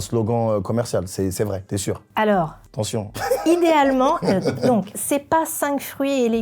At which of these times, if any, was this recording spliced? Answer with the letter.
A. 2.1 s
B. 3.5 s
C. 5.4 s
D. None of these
D